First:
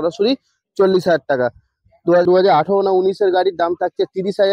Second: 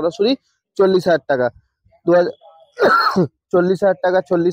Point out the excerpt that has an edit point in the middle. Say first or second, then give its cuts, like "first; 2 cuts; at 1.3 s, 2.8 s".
first; 1 cut; at 2.2 s